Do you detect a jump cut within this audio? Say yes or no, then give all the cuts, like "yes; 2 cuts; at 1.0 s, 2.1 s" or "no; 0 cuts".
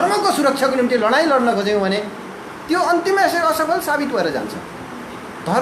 no; 0 cuts